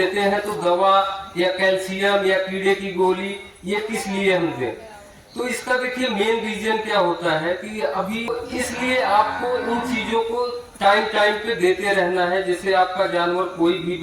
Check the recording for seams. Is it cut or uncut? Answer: cut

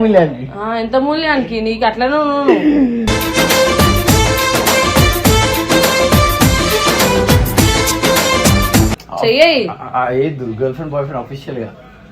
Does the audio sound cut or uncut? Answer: cut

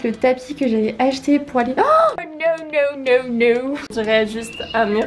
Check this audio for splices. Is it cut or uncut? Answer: cut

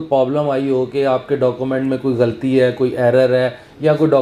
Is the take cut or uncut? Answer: uncut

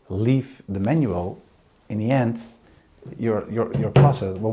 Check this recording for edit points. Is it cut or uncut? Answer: uncut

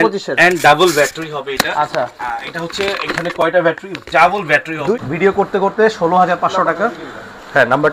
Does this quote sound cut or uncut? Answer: cut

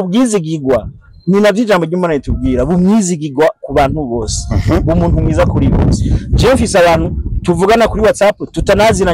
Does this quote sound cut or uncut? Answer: uncut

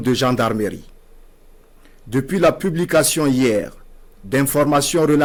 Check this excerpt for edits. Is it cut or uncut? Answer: uncut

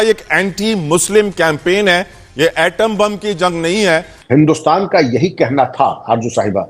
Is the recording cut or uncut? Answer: cut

